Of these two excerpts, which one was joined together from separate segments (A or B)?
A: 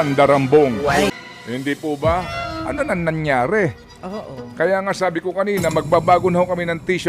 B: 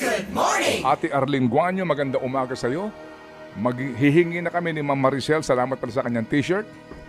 A